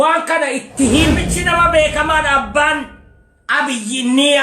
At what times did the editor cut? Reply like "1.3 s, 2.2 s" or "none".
1.3 s